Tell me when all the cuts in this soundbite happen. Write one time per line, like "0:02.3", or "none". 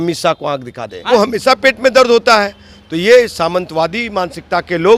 0:01.0

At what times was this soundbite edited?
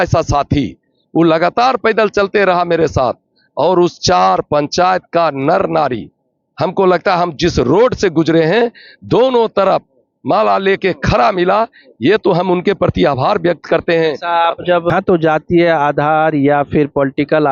0:14.9

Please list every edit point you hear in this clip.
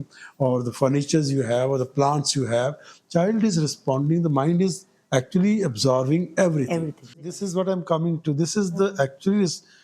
0:07.2

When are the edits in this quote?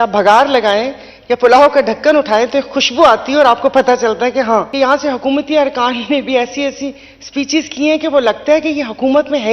0:04.7

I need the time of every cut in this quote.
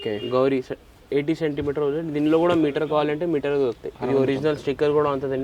0:03.9

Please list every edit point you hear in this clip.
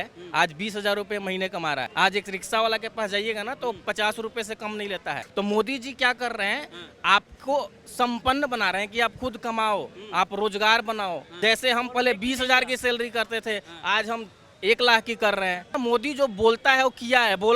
0:05.2
0:11.3
0:15.7

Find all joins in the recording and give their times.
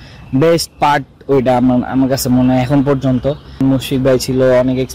0:03.6

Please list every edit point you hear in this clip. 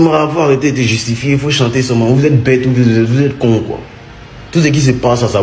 none

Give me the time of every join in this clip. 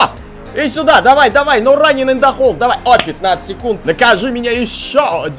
0:03.8

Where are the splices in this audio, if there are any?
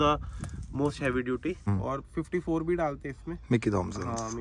0:01.6

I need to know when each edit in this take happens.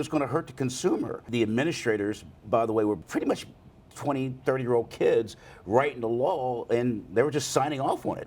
0:01.3
0:03.0

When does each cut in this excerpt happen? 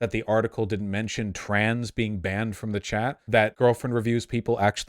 0:03.4

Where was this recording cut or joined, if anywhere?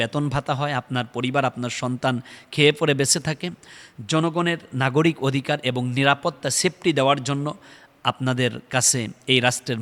none

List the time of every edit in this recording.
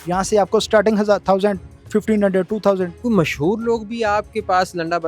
0:02.9

